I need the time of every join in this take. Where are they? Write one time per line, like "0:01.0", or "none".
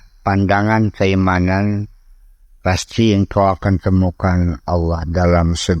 none

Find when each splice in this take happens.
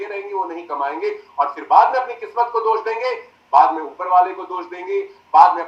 none

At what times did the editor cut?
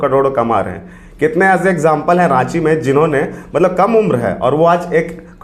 none

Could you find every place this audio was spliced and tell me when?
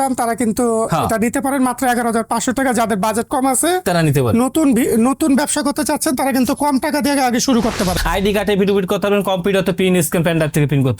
0:07.9

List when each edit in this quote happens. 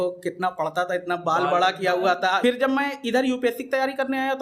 0:02.4

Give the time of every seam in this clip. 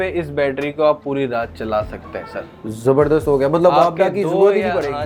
none

